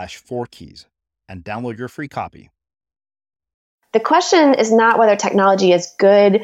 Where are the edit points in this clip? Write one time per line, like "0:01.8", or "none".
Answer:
0:03.7